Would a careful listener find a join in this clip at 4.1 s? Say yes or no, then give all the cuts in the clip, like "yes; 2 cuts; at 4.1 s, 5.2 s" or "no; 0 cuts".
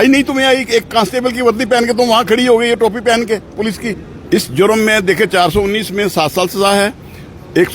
yes; 1 cut; at 4.1 s